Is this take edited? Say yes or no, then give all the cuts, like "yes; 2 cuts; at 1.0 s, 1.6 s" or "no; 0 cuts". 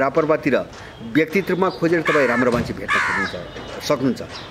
no; 0 cuts